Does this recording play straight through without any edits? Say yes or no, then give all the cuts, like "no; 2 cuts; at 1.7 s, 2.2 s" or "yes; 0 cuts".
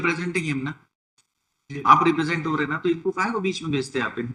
yes; 0 cuts